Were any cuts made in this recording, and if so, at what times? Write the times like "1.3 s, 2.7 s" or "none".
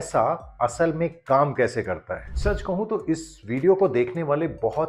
2.2 s